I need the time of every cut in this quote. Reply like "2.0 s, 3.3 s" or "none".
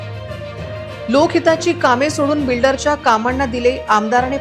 none